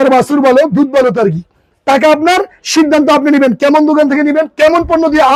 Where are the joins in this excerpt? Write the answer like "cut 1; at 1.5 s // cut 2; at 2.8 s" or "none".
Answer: none